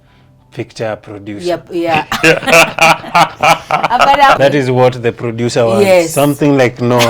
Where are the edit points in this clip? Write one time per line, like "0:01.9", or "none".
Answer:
0:04.4